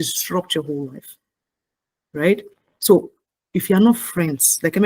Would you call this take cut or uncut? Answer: uncut